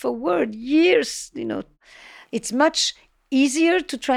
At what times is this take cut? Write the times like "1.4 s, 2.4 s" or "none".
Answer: 2.0 s